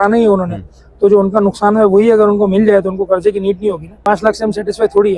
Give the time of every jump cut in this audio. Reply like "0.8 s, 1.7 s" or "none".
4.0 s